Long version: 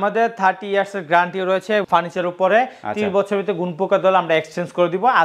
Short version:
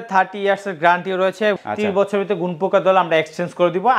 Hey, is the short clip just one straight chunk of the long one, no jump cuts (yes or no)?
no